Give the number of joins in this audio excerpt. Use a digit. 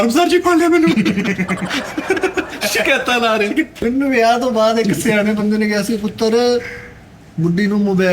1